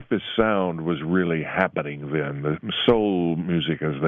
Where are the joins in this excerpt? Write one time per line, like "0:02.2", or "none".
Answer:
none